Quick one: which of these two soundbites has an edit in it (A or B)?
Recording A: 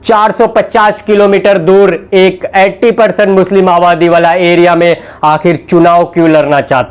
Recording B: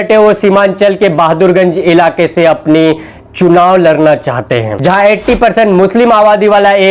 B